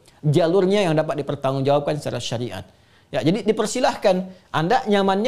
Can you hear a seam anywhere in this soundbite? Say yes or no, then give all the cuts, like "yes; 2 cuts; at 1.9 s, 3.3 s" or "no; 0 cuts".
no; 0 cuts